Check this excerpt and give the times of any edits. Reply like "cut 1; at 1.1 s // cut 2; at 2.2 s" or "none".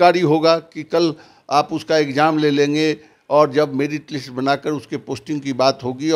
none